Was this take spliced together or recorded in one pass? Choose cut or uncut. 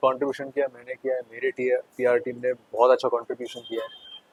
uncut